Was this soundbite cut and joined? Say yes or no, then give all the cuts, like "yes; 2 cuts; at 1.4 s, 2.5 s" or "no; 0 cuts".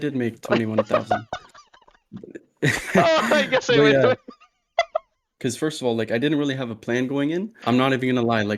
yes; 2 cuts; at 5.2 s, 7.5 s